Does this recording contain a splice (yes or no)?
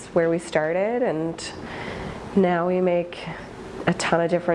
no